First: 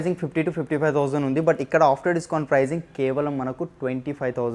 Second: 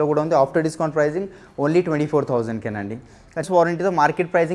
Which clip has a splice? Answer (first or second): second